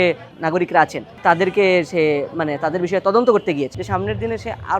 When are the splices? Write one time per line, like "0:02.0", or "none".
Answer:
0:01.1
0:03.8